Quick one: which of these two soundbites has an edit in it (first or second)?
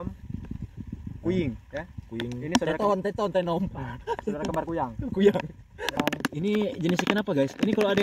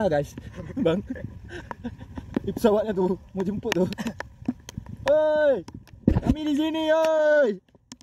first